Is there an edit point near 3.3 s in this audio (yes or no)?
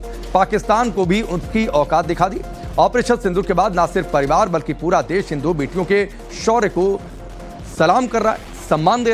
yes